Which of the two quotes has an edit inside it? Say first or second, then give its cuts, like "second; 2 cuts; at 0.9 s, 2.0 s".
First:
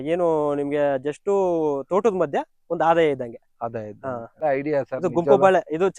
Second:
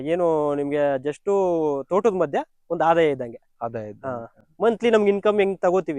first; 1 cut; at 4.4 s